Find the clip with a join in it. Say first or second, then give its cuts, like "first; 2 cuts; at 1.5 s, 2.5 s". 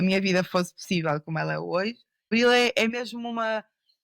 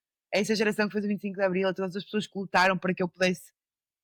first; 1 cut; at 2.3 s